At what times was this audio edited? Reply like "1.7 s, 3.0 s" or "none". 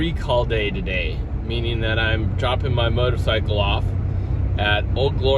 none